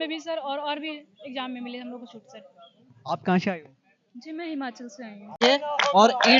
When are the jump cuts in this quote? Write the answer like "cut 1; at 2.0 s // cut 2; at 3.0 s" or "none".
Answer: cut 1; at 5.4 s

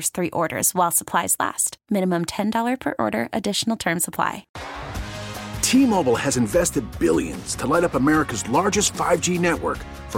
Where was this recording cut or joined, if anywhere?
cut 1; at 4.5 s

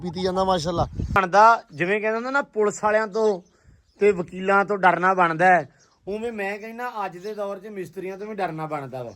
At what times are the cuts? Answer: cut 1; at 1.2 s

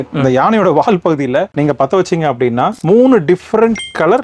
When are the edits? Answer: cut 1; at 1.5 s // cut 2; at 2.8 s

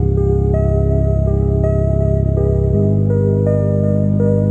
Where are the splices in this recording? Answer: none

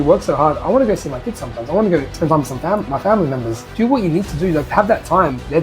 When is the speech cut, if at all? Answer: cut 1; at 3.6 s // cut 2; at 4.7 s

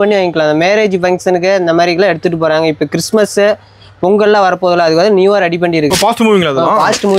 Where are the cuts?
cut 1; at 5.9 s

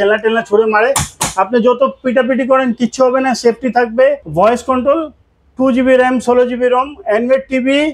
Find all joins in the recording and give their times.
cut 1; at 4.2 s

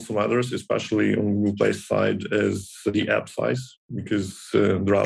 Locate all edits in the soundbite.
cut 1; at 2.9 s

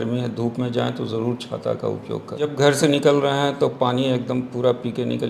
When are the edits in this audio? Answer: cut 1; at 2.5 s

